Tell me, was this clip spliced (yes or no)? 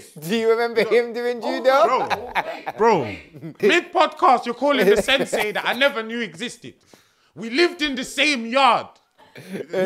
yes